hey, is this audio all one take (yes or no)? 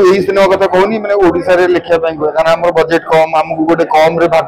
yes